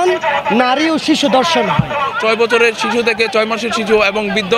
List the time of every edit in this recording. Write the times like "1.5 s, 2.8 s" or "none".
2.1 s